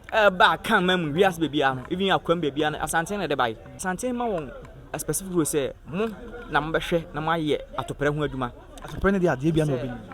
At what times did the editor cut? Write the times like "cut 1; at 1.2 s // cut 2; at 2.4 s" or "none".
cut 1; at 3.8 s